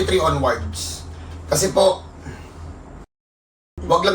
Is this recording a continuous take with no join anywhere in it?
no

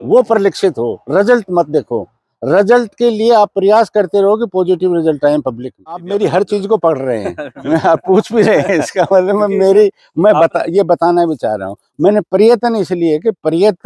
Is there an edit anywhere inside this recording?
yes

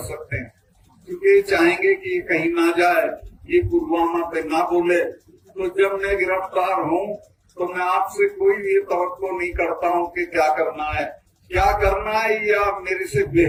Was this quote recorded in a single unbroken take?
yes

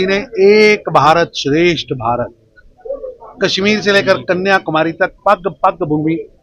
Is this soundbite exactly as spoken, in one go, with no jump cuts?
yes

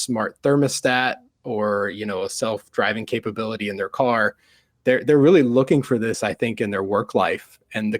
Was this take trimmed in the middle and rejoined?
no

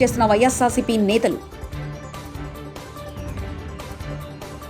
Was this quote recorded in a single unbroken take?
yes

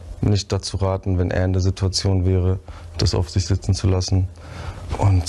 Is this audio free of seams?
yes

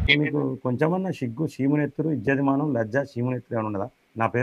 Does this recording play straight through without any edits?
yes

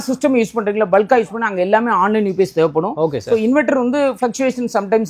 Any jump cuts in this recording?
no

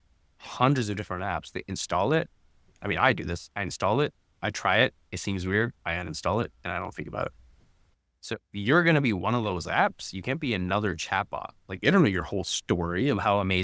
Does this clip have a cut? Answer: no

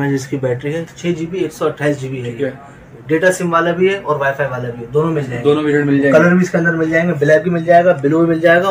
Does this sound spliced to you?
yes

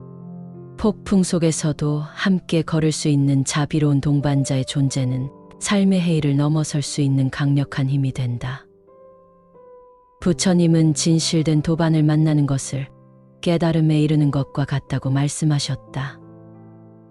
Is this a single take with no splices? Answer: no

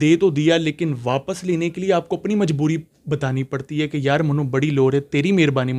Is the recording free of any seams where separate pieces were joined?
yes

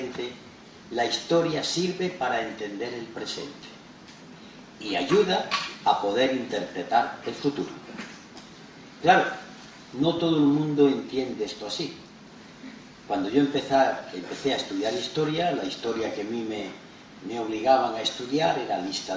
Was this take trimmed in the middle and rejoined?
yes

